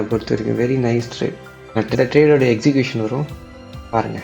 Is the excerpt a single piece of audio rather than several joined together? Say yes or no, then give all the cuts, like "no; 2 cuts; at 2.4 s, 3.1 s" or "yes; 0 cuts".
no; 1 cut; at 2.0 s